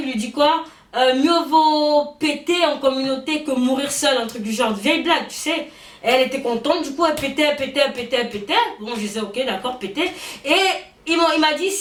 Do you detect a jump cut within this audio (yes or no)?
no